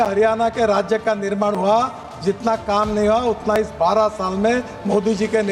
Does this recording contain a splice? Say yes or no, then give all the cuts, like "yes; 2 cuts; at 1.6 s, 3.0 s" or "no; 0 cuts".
no; 0 cuts